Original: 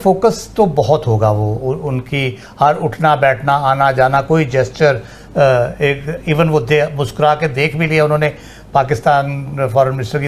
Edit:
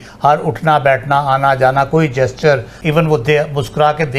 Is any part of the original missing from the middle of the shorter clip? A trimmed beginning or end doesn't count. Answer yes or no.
yes